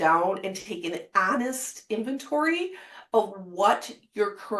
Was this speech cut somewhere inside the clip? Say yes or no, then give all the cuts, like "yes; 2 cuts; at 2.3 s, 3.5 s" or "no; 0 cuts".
no; 0 cuts